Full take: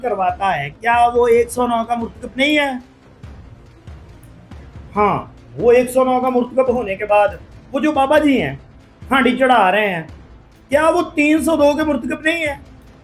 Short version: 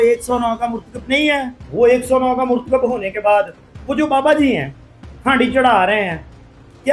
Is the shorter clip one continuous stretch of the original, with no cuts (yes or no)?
no